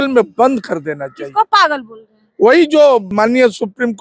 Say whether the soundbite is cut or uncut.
cut